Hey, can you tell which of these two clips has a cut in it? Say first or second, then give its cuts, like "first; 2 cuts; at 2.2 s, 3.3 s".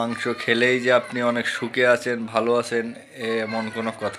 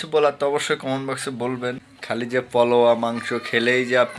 second; 1 cut; at 1.9 s